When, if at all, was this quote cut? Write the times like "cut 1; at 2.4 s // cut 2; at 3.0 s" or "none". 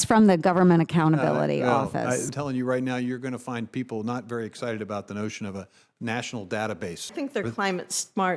cut 1; at 2.3 s // cut 2; at 7.1 s